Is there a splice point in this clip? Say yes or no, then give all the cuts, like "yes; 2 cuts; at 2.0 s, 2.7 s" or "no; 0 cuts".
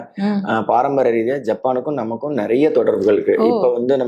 no; 0 cuts